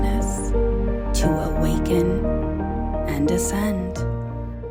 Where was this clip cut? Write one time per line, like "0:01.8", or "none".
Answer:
none